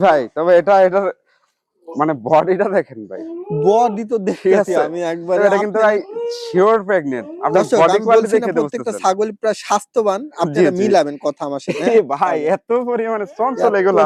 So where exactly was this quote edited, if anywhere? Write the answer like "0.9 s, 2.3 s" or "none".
none